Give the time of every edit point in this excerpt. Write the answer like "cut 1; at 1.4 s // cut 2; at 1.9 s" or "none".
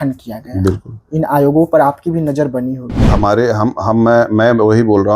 cut 1; at 2.9 s